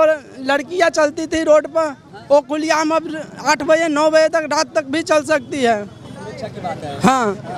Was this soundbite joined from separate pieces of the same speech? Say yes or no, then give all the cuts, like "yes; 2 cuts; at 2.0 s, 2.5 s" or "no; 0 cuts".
no; 0 cuts